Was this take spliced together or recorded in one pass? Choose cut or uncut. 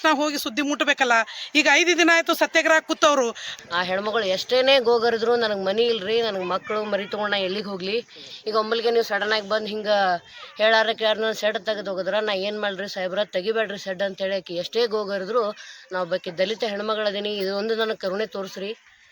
cut